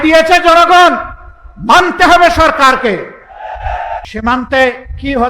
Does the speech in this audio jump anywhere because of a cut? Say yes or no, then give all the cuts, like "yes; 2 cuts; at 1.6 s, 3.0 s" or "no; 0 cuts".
yes; 1 cut; at 4.1 s